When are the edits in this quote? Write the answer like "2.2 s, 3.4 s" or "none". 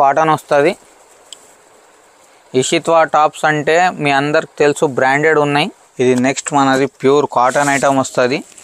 5.8 s